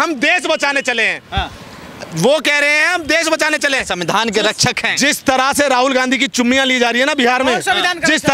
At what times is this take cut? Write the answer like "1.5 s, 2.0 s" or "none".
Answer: none